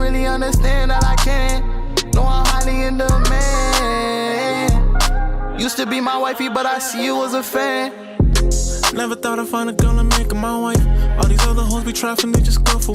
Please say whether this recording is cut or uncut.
uncut